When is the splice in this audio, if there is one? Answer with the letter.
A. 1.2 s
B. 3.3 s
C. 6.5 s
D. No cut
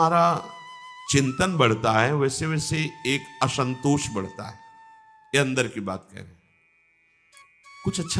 D